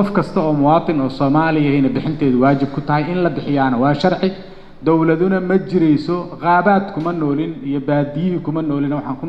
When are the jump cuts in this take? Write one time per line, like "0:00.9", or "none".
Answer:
none